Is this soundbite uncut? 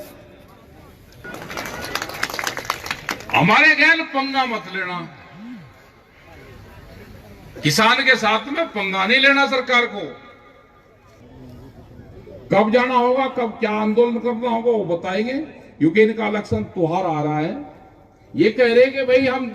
no; 2 cuts; at 1.2 s, 11.2 s

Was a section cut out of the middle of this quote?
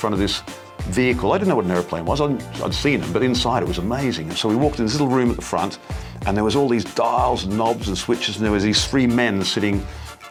no; 0 cuts

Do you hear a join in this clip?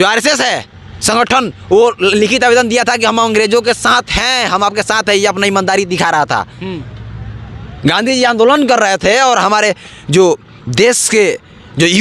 no; 0 cuts

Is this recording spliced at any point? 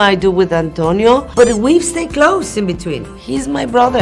yes; 2 cuts; at 1.3 s, 3.1 s

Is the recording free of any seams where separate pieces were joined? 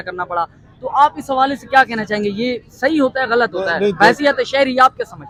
yes; 0 cuts

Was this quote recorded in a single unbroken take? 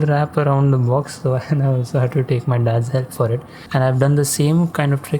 no; 1 cut; at 3.5 s

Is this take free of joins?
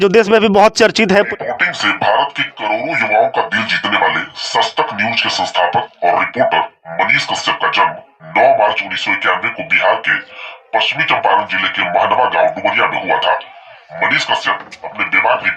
no; 1 cut; at 1.3 s

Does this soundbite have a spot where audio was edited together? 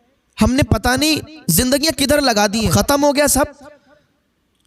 yes; 1 cut; at 2.7 s

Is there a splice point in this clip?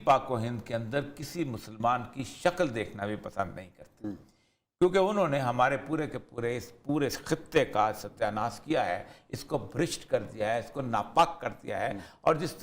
no; 0 cuts

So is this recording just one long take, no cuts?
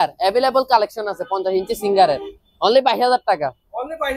yes; 0 cuts

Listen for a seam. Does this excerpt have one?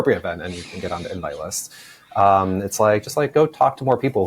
no; 0 cuts

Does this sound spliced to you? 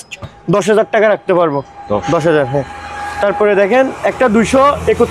no; 0 cuts

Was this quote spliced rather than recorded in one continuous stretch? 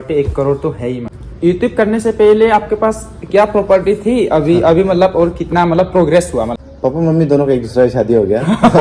yes; 2 cuts; at 1.0 s, 6.6 s

